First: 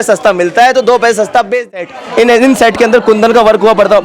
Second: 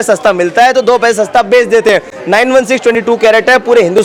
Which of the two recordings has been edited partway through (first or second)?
first